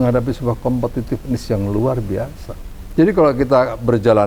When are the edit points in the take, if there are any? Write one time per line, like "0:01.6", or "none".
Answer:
none